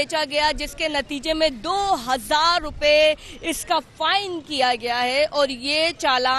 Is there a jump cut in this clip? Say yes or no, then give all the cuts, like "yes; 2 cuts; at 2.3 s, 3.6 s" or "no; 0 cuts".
no; 0 cuts